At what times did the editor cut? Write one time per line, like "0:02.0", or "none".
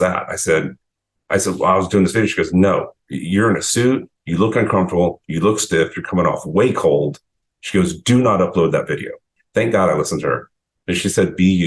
0:09.3

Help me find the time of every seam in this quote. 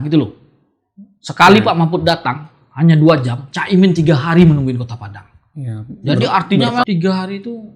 0:06.8

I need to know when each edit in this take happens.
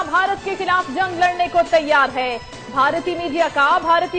0:01.4

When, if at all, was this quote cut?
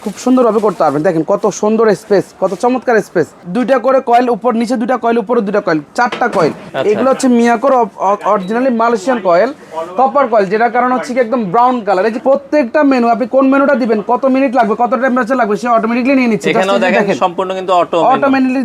0:03.4
0:06.7
0:12.2

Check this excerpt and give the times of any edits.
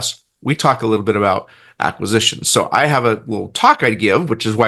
none

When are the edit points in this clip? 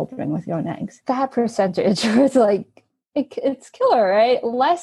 0:00.9

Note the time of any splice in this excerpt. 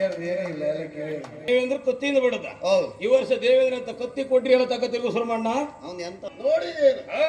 0:01.4
0:06.3

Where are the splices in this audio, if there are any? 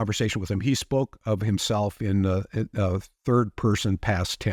none

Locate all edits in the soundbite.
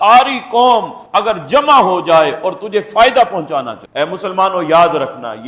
0:03.8

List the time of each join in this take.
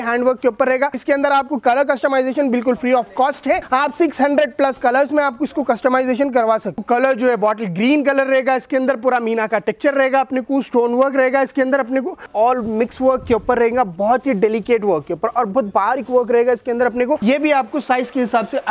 0:01.0
0:03.6
0:06.8
0:12.2
0:17.2

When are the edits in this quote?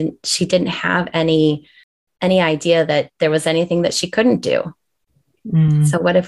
none

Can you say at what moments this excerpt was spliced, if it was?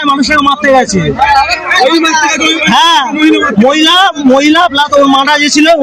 none

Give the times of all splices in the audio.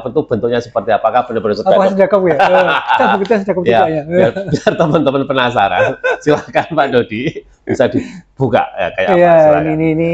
none

